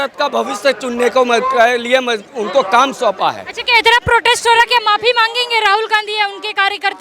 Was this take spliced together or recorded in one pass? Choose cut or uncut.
uncut